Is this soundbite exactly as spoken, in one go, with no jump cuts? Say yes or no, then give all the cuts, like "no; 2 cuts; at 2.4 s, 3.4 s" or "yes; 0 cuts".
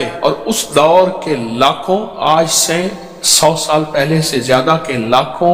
yes; 0 cuts